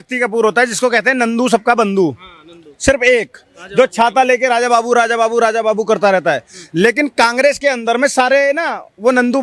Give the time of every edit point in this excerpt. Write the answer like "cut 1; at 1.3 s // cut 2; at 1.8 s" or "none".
none